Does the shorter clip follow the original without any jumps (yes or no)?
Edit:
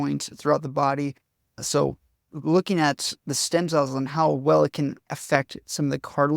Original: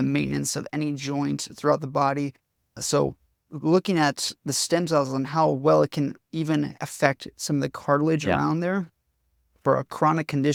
no